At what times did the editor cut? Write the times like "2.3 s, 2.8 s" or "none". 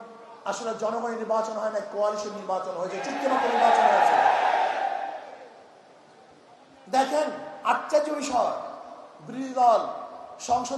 none